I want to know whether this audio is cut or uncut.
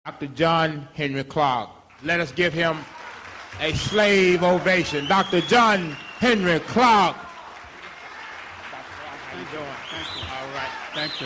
uncut